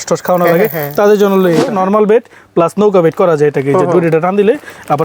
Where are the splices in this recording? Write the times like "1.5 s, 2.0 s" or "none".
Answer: 1.7 s